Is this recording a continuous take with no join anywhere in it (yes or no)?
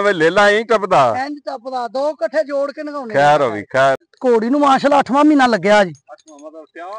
no